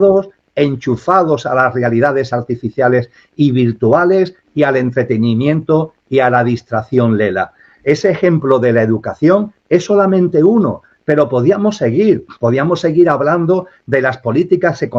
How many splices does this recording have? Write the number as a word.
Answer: zero